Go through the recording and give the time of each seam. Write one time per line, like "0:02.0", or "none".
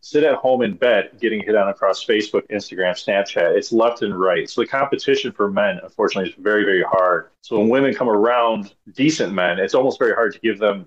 0:07.3
0:08.8